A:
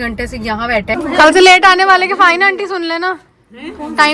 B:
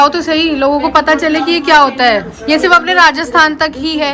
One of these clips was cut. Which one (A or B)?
A